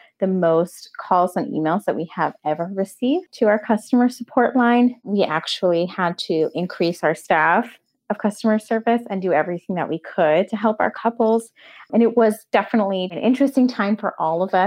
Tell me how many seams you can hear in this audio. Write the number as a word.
one